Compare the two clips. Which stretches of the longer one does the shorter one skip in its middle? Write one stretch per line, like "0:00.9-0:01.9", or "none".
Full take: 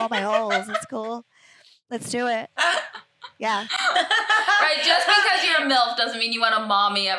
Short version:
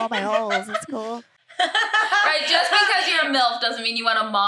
0:01.6-0:03.9